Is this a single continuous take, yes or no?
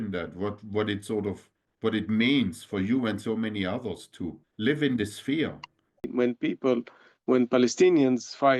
no